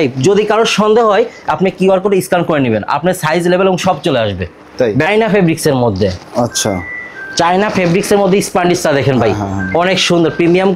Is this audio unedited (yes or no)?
no